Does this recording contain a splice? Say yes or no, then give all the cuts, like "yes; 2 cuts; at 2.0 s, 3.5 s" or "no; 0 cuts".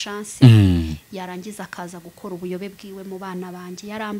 no; 0 cuts